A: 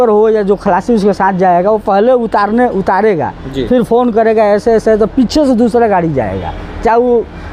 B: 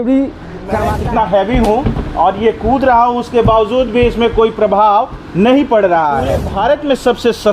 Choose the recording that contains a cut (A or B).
B